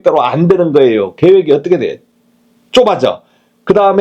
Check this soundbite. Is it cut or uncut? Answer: uncut